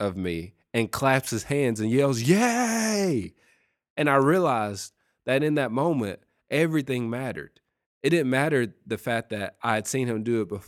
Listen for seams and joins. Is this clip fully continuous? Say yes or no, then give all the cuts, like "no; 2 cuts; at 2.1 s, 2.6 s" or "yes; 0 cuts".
yes; 0 cuts